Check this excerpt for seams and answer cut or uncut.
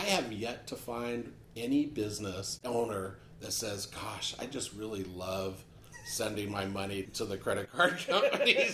cut